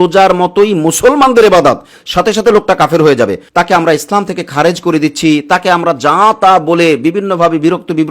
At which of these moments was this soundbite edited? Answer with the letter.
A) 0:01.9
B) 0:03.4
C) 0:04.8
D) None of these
B